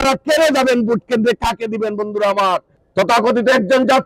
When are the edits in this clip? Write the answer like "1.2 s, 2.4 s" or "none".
2.8 s